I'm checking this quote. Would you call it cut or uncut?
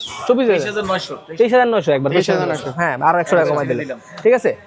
uncut